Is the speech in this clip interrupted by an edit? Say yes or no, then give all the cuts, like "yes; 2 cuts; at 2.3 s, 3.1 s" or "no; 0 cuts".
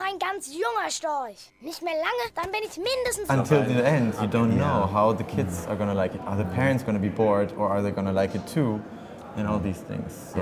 no; 0 cuts